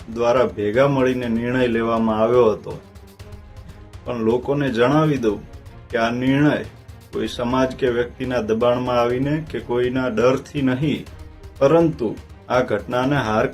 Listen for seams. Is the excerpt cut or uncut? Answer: uncut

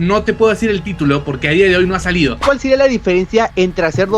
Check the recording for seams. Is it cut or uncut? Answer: cut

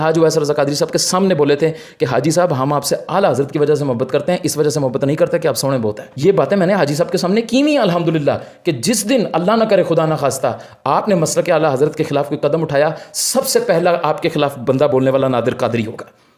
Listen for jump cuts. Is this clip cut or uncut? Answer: uncut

